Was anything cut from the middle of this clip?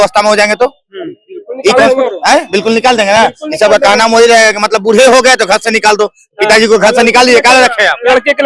no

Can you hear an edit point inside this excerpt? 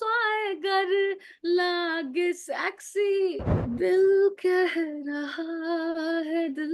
yes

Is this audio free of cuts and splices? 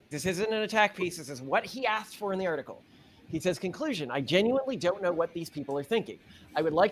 yes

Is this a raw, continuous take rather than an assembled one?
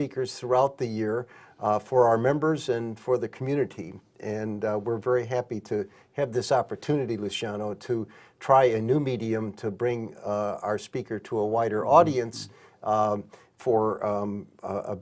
no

